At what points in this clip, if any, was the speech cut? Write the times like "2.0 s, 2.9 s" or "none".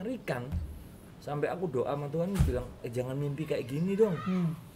2.8 s